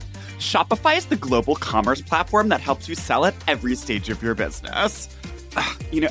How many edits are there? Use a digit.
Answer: 1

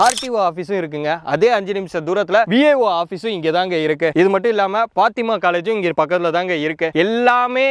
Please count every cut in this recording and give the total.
0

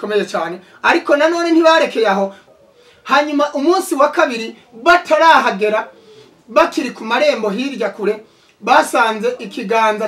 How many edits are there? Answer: 1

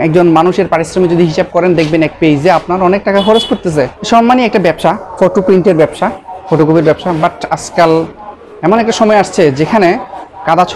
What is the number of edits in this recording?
1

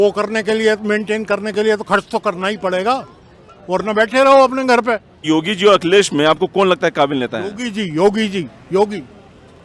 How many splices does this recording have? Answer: 1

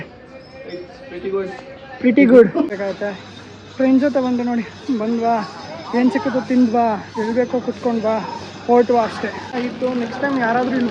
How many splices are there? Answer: 2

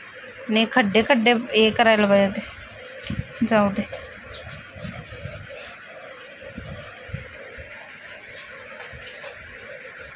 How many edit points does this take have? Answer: 0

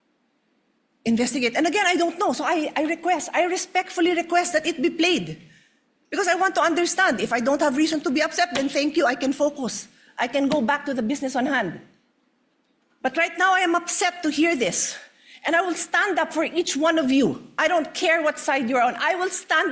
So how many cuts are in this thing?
0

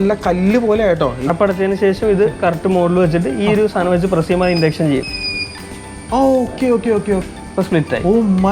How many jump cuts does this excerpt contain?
2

